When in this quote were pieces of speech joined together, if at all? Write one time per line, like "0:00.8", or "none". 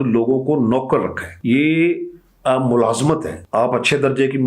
0:01.3
0:03.4

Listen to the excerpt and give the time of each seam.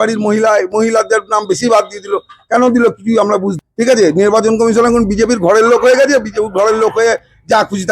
0:03.5

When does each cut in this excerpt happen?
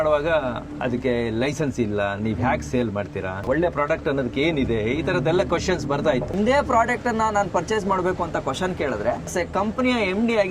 0:03.4
0:06.3

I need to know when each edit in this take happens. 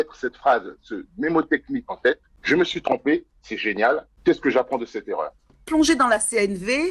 0:02.3
0:04.1
0:05.6

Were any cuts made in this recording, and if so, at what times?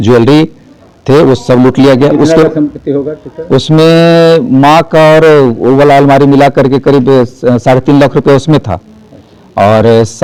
none

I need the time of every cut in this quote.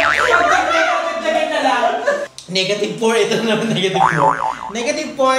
0:02.2

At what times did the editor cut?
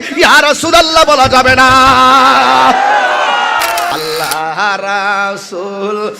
0:03.9

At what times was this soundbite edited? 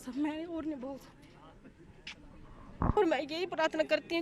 0:03.0

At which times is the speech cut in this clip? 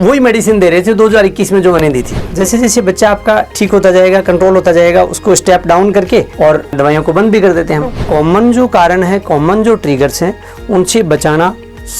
0:02.2
0:06.3
0:08.0

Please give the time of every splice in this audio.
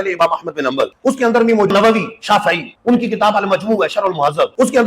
0:01.7

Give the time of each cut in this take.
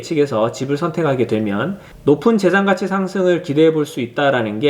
0:01.9

